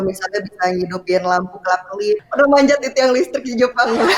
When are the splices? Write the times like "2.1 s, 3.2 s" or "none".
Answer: 2.2 s